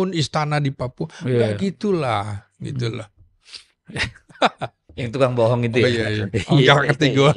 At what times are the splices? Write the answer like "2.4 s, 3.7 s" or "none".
none